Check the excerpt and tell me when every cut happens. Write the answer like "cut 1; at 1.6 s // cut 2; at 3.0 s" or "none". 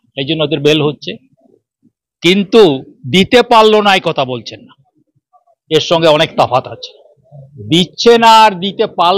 none